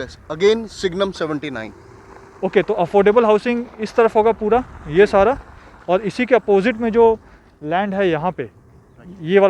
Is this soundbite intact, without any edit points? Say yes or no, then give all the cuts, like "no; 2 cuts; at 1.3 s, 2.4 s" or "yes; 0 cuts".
yes; 0 cuts